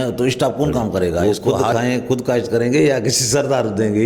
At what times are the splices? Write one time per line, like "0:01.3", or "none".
0:01.2